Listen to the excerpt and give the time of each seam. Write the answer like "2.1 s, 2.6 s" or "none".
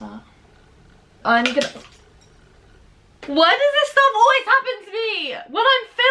1.2 s